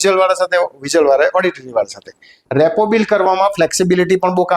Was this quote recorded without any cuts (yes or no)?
no